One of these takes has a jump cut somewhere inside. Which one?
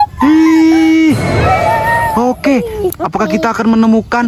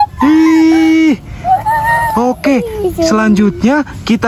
first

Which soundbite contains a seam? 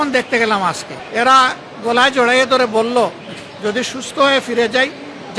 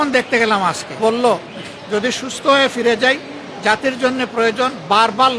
second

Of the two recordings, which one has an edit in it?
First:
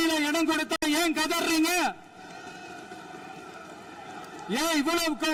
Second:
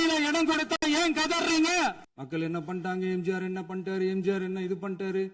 second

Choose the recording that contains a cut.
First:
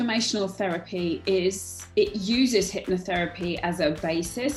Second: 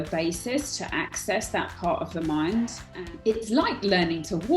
second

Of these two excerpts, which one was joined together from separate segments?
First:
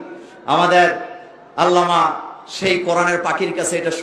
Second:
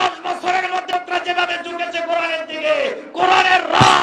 second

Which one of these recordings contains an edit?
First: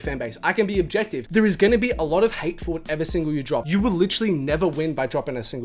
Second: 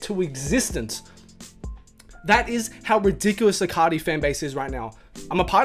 first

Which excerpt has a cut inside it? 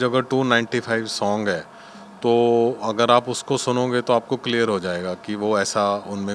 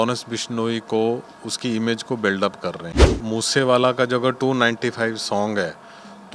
second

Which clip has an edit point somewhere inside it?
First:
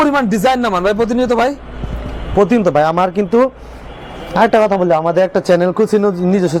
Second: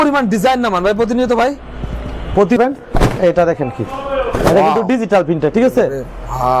second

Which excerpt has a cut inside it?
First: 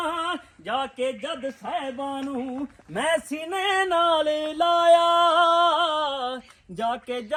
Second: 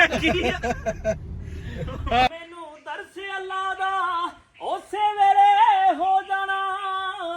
second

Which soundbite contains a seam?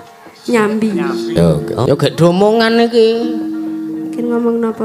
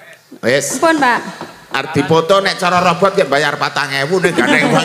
first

